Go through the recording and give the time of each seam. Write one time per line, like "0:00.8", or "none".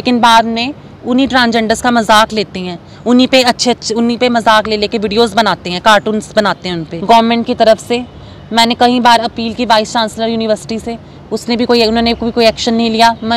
0:06.9